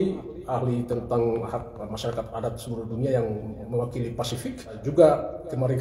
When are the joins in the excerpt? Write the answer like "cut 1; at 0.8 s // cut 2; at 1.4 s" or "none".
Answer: cut 1; at 4.8 s